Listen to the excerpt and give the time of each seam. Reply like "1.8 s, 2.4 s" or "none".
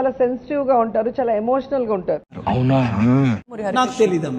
2.4 s, 3.4 s